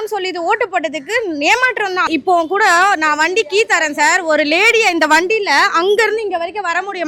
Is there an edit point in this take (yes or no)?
yes